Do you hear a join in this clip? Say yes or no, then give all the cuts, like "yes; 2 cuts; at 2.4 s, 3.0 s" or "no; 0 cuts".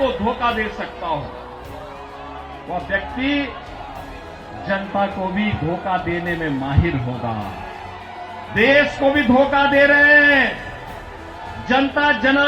yes; 1 cut; at 8.5 s